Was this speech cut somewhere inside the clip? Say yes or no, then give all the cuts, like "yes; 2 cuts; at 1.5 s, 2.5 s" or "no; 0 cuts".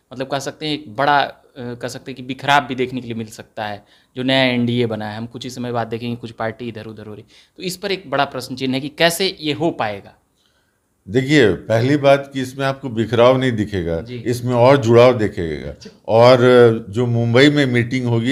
no; 0 cuts